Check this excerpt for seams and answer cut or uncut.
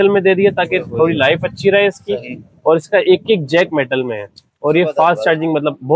uncut